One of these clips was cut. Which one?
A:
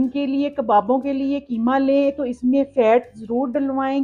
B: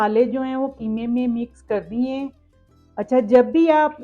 B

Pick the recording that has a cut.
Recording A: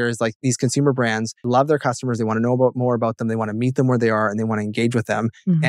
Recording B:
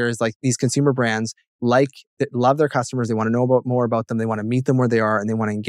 A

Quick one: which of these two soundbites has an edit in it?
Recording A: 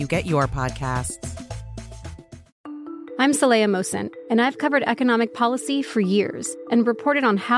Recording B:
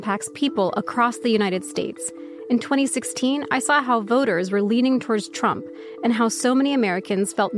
A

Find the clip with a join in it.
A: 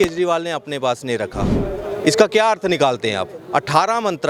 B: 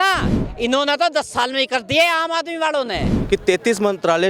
B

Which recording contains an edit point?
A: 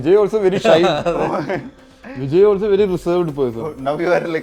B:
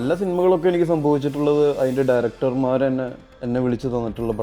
B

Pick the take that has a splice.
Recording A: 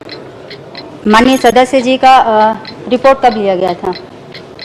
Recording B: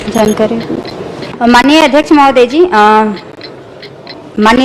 B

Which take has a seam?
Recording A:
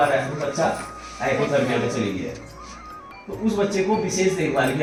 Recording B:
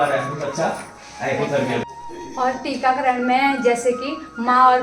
B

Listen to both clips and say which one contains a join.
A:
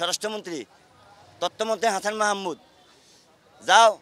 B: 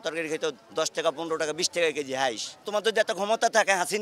B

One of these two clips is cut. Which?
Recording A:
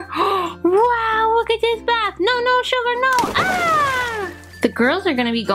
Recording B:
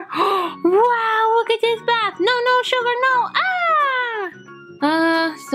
A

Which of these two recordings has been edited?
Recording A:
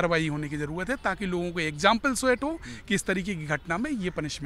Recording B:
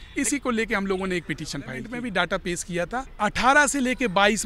B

